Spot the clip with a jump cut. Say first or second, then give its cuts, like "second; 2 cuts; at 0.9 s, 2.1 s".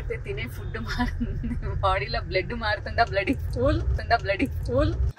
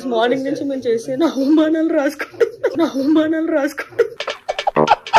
second; 2 cuts; at 2.7 s, 4.1 s